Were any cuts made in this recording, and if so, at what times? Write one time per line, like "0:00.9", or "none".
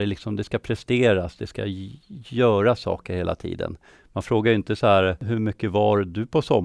0:05.2